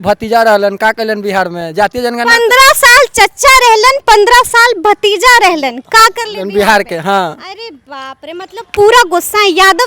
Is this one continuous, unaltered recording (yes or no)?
yes